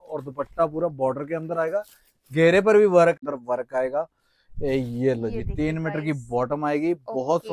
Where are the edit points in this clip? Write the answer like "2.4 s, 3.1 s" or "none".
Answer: 3.2 s